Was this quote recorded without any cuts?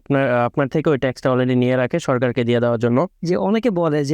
no; 1 cut; at 3.2 s

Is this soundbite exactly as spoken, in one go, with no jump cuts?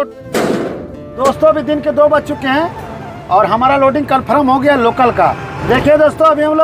no; 2 cuts; at 1.2 s, 5.5 s

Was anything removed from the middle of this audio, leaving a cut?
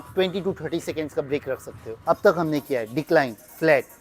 yes; 1 cut; at 1.9 s

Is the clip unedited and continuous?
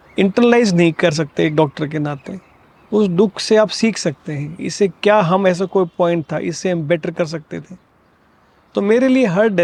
yes; 0 cuts

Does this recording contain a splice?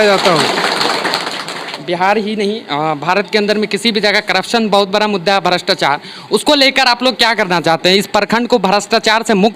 yes; 1 cut; at 1.7 s

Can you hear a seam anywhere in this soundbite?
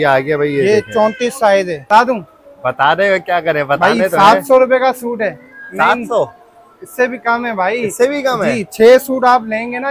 yes; 1 cut; at 1.8 s

